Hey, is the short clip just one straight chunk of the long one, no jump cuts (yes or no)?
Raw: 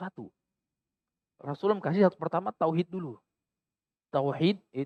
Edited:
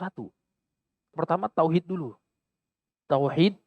no